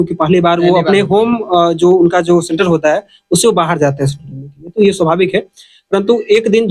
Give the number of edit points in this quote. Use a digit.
0